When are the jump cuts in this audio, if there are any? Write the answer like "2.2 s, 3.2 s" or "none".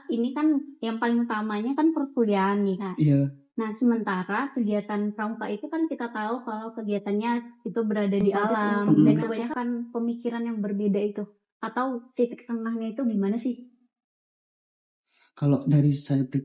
9.4 s